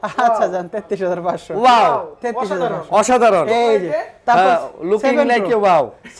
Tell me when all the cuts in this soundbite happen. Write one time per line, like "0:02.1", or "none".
none

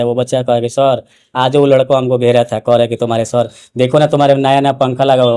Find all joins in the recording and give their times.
none

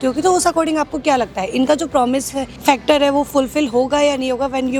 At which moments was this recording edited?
none

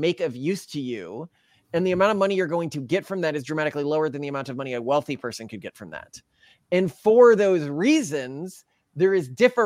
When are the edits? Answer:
none

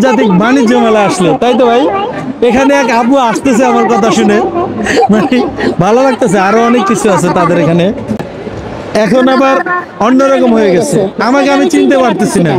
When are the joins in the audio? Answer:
0:08.3

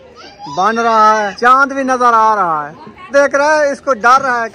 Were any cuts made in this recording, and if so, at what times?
0:01.3
0:03.1

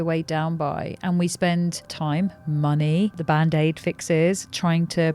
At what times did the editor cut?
0:01.9
0:03.2

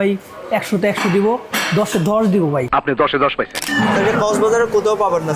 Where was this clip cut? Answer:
0:03.7

